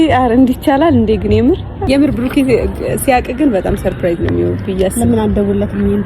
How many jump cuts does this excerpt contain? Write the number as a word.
one